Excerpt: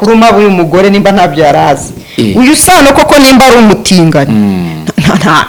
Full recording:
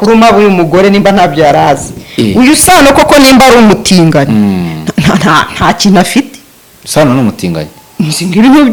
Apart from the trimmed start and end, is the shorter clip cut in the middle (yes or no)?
no